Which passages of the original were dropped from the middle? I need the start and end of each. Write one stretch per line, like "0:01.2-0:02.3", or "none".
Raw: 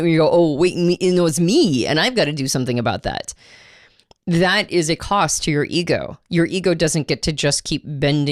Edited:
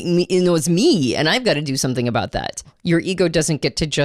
0:03.4-0:06.2